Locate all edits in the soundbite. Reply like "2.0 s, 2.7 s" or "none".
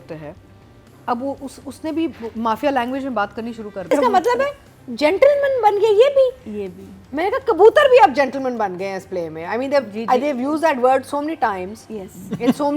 3.9 s